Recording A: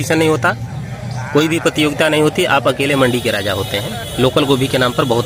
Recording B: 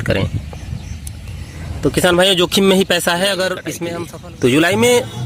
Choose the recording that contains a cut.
B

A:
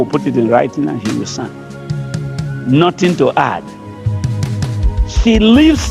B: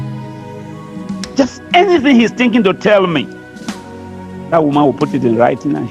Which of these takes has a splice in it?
B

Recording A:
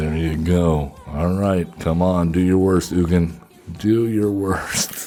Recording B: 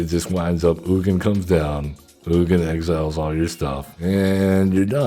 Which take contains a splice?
B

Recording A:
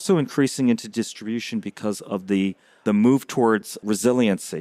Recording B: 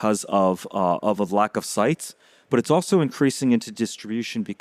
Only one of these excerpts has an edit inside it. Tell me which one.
A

